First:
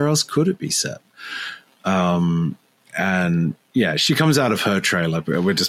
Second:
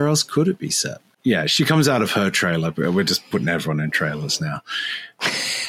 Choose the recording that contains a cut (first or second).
second